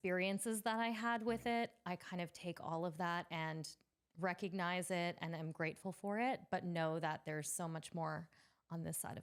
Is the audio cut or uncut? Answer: uncut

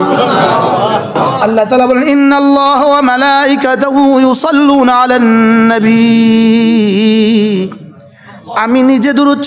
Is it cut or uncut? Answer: cut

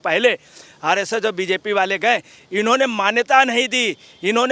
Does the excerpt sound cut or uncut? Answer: uncut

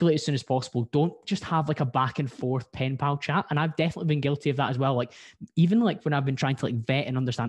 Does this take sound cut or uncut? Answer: uncut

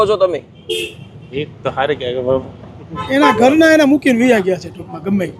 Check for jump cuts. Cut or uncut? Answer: cut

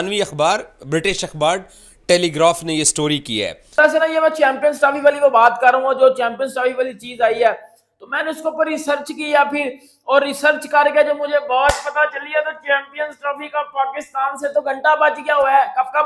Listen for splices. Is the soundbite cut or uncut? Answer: cut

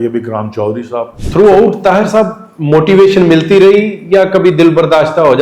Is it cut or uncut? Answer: cut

